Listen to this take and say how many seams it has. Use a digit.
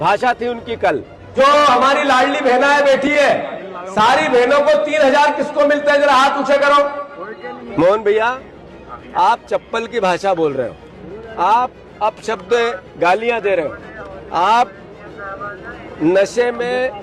2